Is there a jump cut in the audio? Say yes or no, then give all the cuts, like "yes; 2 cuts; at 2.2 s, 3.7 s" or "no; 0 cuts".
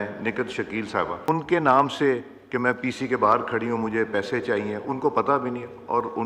yes; 1 cut; at 1.3 s